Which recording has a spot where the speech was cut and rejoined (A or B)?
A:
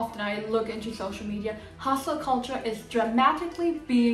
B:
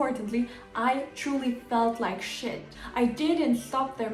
B